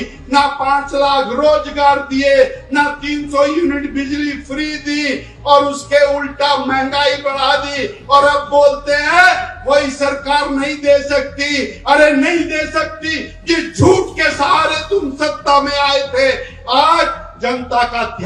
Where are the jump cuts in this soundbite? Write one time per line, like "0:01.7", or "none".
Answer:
none